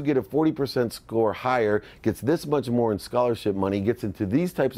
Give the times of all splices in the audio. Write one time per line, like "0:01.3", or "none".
none